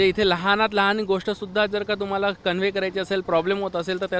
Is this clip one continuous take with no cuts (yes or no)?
yes